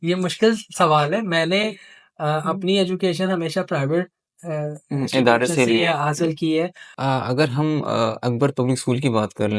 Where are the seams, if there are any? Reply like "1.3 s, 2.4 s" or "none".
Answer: 6.9 s